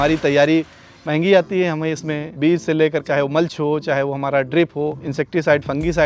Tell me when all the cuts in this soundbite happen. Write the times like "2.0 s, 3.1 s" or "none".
2.2 s, 3.0 s, 5.0 s

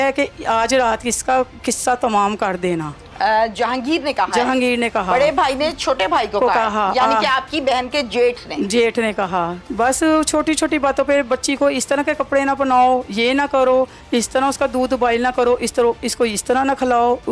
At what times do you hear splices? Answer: 9.6 s

